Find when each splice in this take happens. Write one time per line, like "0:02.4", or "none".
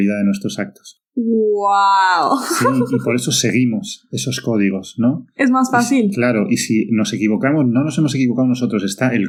none